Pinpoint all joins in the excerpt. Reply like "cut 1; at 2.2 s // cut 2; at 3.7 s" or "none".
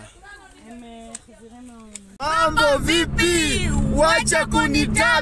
cut 1; at 2.1 s